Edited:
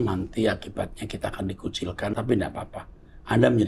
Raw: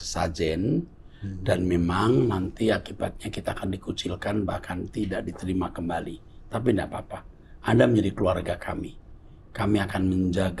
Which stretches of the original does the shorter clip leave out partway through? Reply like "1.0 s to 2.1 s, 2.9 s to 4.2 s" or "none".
4.4 s to 6.5 s